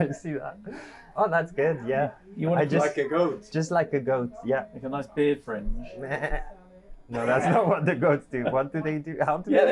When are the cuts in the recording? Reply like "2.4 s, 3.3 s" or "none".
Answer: none